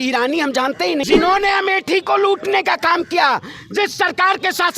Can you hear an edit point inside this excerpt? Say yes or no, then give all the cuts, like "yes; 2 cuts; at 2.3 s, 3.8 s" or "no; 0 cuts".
yes; 1 cut; at 1.0 s